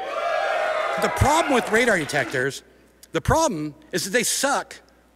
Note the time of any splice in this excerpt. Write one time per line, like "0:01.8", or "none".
0:01.0